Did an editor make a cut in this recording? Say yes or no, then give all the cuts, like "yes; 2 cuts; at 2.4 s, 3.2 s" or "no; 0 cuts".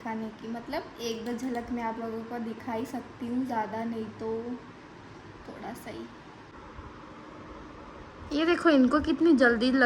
yes; 1 cut; at 6.5 s